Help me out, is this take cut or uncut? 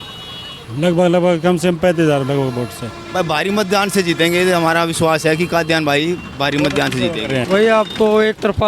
cut